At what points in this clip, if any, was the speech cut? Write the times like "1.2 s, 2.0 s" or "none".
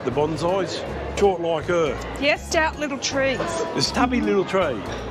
1.1 s, 2.4 s, 3.9 s